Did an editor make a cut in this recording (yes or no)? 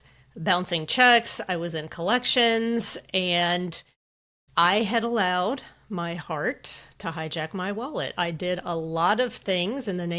no